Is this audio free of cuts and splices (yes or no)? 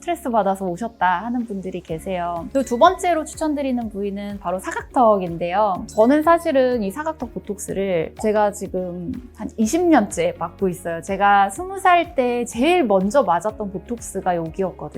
no